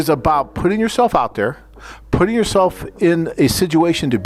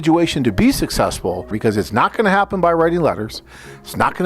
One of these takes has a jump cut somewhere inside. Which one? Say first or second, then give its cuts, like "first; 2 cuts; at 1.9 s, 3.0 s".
second; 1 cut; at 1.5 s